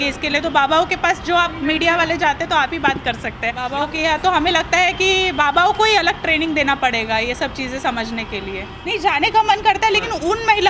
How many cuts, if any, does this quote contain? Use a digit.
2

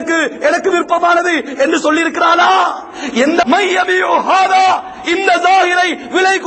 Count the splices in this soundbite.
1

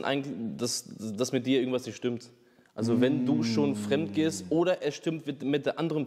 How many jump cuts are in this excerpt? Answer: 0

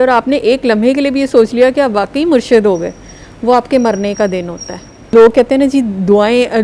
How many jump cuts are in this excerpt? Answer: 1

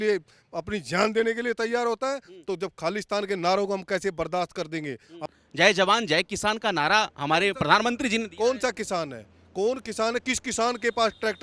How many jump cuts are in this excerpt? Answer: 0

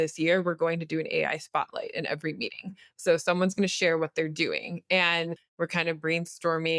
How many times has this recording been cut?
1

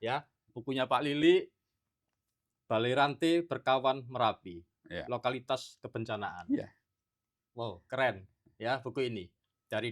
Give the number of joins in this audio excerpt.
0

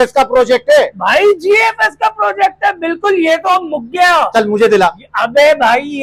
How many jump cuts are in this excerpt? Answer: 0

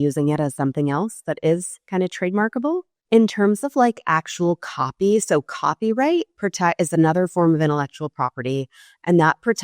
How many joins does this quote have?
1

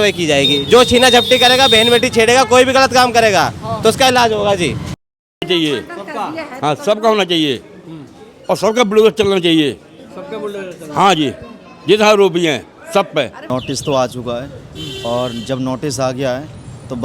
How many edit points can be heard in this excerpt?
2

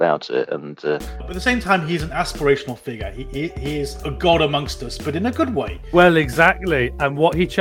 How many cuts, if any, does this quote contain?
2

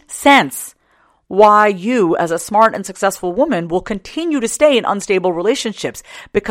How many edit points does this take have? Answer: 0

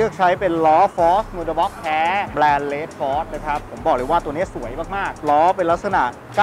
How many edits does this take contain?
2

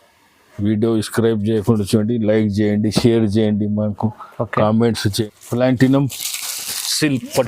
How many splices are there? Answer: 1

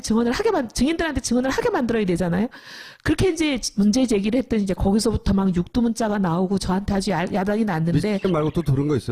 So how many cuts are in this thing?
1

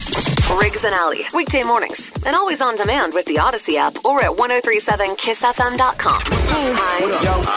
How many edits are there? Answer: 1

